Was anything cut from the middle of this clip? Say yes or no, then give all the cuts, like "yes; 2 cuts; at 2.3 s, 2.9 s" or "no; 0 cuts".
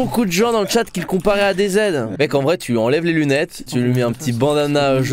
yes; 2 cuts; at 2.1 s, 3.6 s